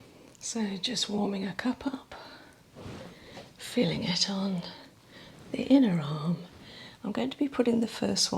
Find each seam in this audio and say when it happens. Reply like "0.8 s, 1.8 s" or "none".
2.6 s